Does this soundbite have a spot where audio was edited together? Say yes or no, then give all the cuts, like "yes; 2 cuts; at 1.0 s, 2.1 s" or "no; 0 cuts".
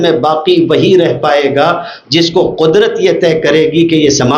no; 0 cuts